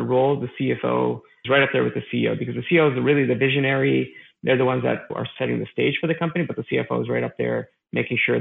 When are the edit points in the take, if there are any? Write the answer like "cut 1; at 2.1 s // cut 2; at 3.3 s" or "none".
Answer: none